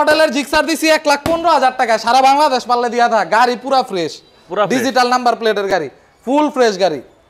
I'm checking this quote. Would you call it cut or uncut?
uncut